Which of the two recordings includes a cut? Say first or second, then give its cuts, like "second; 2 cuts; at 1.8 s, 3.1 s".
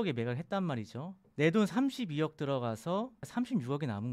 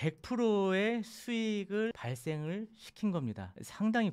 first; 2 cuts; at 1.2 s, 3.2 s